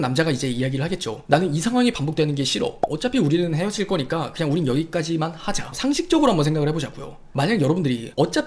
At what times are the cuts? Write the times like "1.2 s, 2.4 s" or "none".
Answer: 5.7 s